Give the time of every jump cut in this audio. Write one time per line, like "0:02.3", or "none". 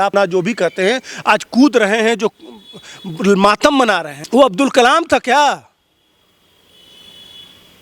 0:04.1